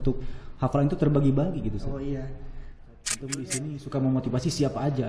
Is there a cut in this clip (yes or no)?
yes